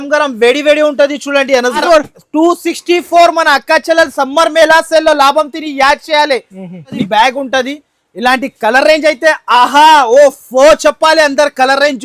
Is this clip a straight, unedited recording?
no; 2 cuts; at 1.8 s, 7.0 s

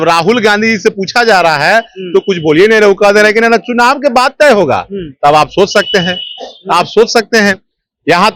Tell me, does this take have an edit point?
no; 0 cuts

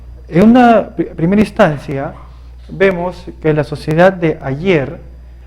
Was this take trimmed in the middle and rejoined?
no; 0 cuts

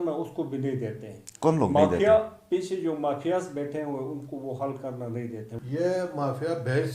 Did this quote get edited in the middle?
yes; 1 cut; at 5.5 s

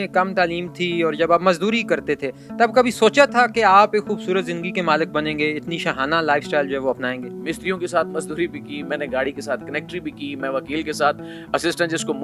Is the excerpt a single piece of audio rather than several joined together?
no; 1 cut; at 7.3 s

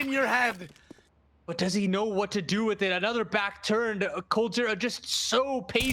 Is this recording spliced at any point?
yes; 1 cut; at 1.3 s

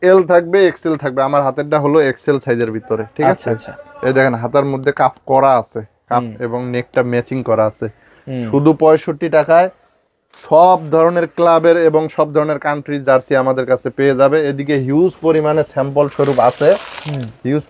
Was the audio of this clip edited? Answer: no; 0 cuts

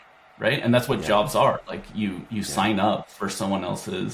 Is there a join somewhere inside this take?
no; 0 cuts

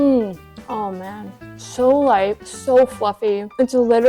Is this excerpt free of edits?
no; 1 cut; at 1.5 s

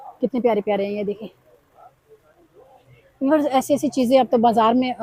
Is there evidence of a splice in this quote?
no; 0 cuts

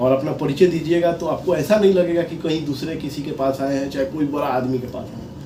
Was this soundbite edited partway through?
no; 0 cuts

